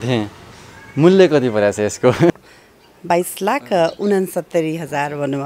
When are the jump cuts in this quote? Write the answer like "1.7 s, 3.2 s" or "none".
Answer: 2.5 s